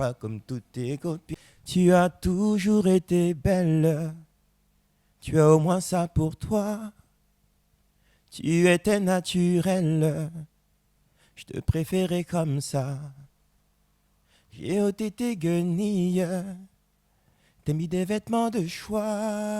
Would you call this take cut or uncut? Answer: cut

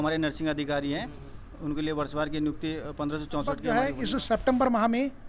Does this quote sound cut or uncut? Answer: cut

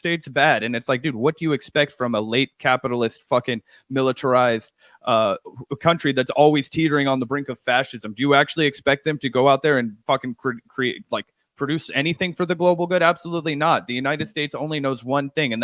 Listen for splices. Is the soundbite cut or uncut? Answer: uncut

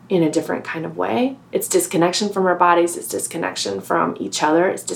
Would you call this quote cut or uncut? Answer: cut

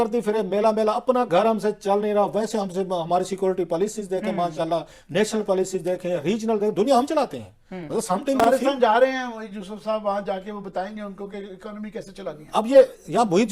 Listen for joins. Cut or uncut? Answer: uncut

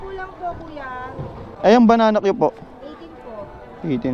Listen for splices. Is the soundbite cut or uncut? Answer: uncut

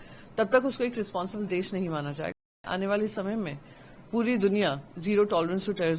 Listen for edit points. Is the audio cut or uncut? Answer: cut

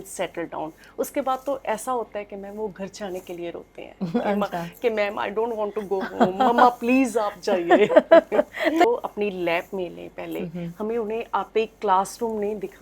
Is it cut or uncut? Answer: cut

